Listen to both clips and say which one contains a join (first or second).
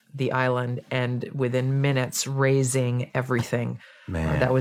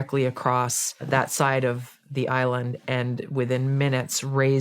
second